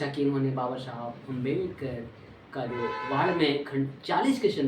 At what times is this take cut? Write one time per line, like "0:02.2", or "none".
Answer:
none